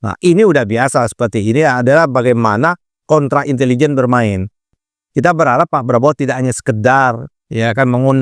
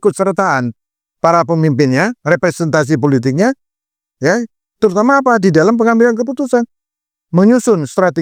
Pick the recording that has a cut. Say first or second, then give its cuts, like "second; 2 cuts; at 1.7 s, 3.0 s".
first; 1 cut; at 4.8 s